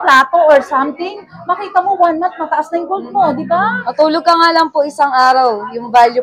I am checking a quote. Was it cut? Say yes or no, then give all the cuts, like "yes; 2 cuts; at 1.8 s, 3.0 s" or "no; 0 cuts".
no; 0 cuts